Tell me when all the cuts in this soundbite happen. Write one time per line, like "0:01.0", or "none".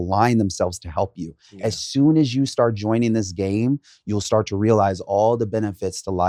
none